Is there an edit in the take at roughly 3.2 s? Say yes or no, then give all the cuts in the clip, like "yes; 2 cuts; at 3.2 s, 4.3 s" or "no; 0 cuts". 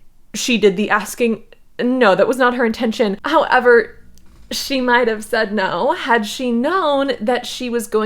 yes; 1 cut; at 3.2 s